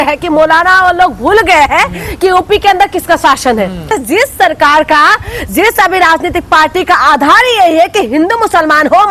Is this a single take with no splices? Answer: no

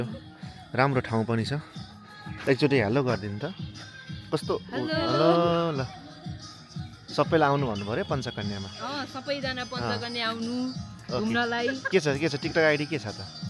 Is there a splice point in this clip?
no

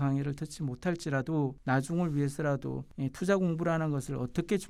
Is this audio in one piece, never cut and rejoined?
yes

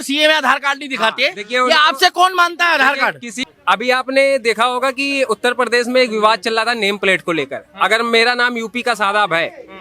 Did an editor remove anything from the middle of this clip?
yes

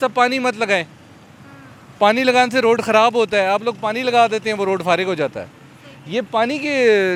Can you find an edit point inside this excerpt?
no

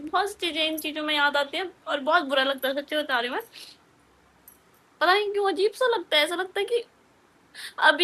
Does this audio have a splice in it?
no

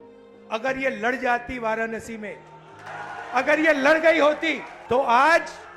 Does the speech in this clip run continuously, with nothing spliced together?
no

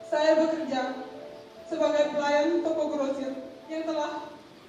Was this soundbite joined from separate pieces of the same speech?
yes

